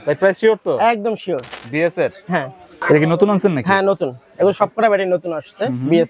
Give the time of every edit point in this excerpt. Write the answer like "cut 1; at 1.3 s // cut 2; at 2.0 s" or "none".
cut 1; at 1.5 s // cut 2; at 2.8 s